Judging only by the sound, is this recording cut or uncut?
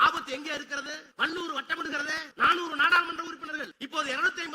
cut